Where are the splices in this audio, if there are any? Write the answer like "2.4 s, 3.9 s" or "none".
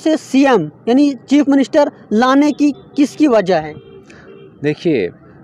none